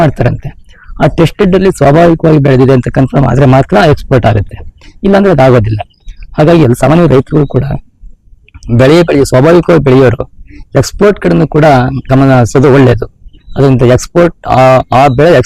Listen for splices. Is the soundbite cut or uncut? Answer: uncut